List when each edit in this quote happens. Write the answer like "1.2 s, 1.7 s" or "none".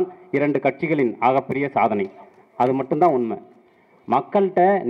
none